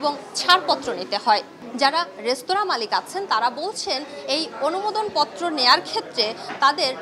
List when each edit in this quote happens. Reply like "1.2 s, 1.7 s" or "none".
1.6 s